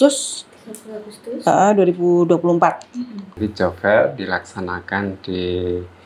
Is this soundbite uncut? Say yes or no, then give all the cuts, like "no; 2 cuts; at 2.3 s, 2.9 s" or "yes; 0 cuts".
no; 1 cut; at 3.4 s